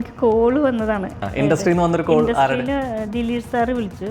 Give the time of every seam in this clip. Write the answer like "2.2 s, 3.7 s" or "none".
1.2 s